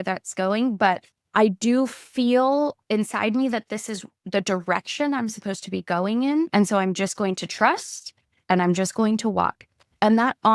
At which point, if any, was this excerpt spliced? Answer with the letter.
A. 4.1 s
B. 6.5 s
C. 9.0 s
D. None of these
B